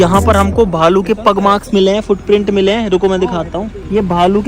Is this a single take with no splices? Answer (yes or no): yes